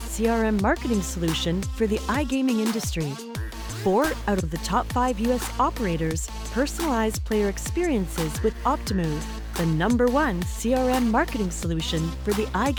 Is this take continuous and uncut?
yes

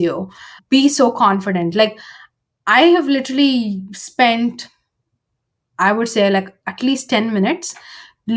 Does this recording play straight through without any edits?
yes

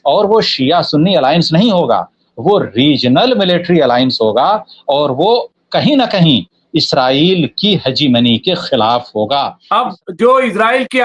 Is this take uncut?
no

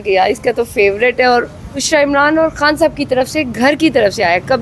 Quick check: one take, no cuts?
no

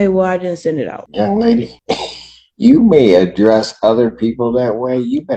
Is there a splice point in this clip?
yes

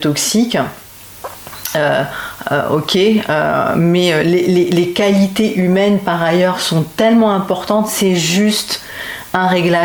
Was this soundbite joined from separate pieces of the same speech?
no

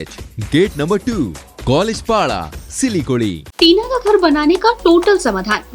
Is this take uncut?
no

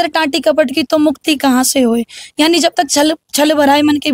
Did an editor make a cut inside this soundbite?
no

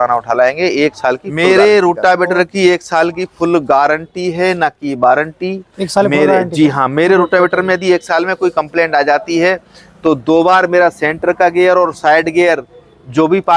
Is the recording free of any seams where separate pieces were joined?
no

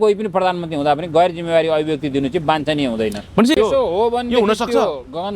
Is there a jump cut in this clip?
yes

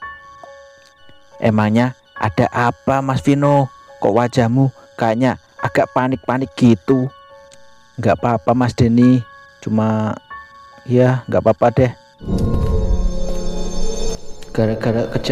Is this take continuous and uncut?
no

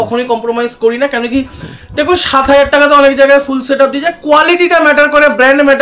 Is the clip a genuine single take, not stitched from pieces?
yes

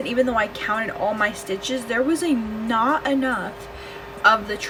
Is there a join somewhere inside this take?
no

